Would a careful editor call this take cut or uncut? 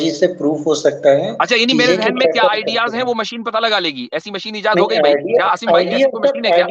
uncut